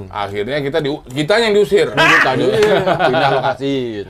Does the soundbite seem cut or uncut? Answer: uncut